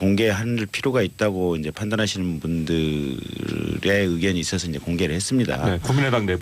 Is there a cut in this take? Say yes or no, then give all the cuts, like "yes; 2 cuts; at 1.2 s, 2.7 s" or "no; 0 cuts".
yes; 1 cut; at 2.7 s